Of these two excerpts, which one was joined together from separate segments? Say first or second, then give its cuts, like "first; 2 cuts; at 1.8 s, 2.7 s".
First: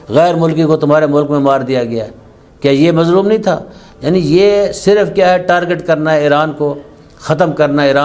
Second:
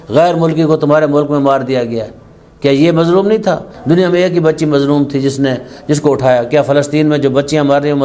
second; 1 cut; at 3.7 s